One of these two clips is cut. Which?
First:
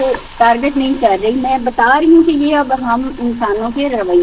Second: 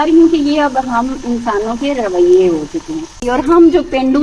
second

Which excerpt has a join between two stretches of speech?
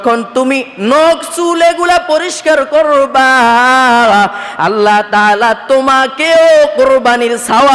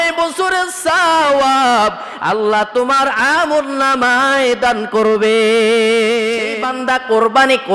second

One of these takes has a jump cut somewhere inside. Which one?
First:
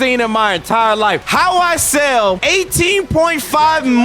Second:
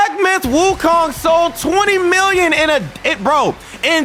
first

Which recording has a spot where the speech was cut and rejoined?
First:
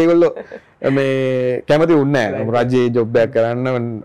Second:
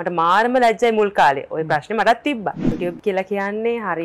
second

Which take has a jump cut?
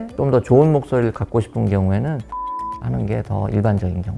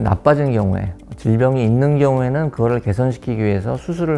first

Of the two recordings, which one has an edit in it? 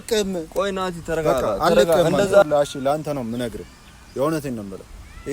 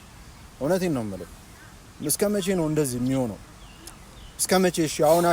first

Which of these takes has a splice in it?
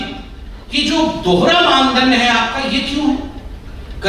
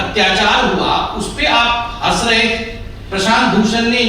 second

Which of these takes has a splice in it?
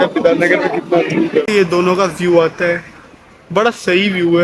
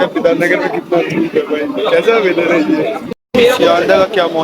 first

